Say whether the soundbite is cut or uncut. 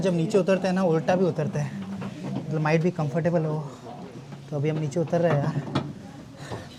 uncut